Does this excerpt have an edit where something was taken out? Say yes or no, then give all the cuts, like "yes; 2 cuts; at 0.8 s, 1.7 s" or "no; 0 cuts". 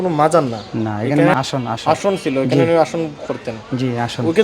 yes; 1 cut; at 1.3 s